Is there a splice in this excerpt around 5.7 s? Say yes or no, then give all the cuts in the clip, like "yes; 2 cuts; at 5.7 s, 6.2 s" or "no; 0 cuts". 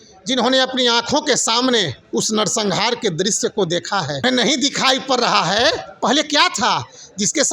no; 1 cut; at 4.2 s